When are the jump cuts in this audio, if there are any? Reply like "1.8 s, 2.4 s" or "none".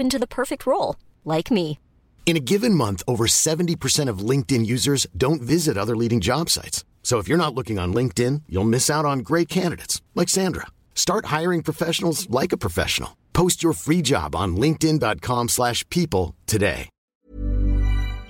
16.9 s